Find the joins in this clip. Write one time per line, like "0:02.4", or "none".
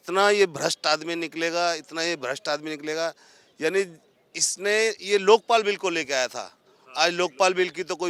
none